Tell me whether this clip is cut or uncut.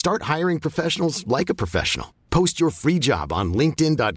uncut